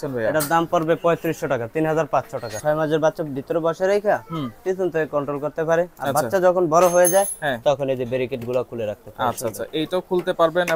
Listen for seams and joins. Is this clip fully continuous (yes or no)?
no